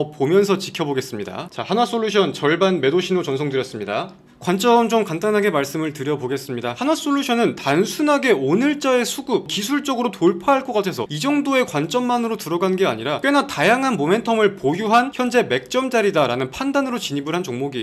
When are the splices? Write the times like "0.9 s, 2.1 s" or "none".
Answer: 6.7 s